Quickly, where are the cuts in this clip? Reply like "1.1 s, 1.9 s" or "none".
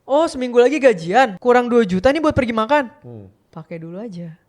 1.4 s